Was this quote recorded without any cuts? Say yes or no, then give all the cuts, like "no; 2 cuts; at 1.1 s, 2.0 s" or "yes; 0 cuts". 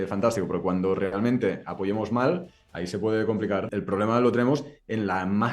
no; 1 cut; at 3.7 s